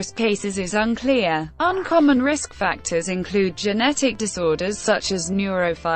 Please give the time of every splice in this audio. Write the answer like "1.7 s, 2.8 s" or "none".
1.5 s